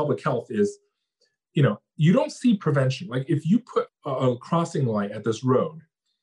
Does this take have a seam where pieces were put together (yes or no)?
yes